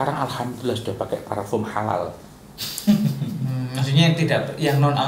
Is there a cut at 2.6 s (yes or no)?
no